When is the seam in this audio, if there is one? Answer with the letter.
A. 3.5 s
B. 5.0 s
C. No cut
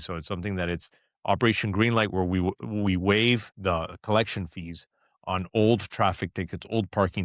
A